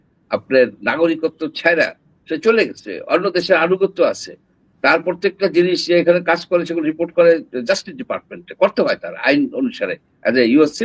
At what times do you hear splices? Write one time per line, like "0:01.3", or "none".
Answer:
none